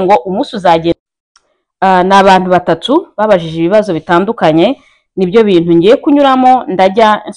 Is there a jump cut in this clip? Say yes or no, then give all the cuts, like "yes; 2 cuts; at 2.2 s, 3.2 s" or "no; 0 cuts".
yes; 1 cut; at 0.9 s